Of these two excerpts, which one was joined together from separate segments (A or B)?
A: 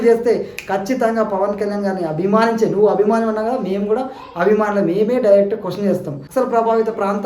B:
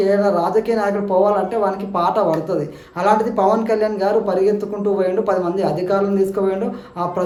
A